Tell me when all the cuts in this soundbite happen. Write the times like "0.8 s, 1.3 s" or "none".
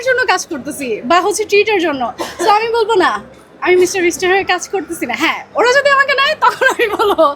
none